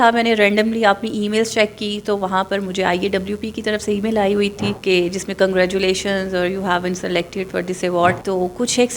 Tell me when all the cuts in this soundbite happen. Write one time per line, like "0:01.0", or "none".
0:04.8
0:08.2